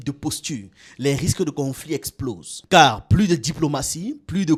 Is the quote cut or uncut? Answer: uncut